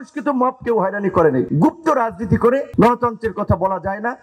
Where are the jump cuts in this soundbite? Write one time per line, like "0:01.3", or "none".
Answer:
0:01.5
0:02.7